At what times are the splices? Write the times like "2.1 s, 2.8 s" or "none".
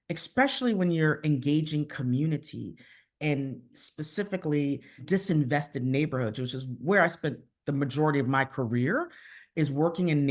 3.8 s, 5.0 s